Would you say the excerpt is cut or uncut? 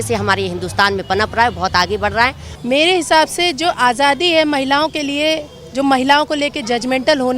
cut